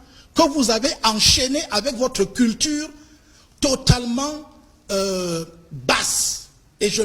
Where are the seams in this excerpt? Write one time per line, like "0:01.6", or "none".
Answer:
none